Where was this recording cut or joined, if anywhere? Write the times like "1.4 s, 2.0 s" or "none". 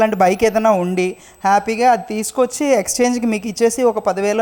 none